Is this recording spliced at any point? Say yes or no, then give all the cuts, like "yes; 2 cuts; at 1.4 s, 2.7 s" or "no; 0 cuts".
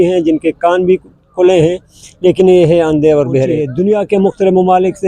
yes; 1 cut; at 3.7 s